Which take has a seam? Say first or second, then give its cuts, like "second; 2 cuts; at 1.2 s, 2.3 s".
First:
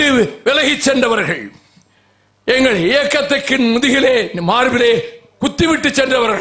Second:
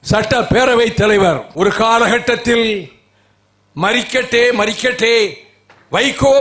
second; 1 cut; at 1.5 s